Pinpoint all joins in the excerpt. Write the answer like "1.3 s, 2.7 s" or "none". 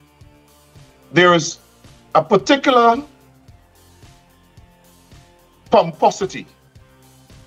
3.5 s, 5.5 s, 6.7 s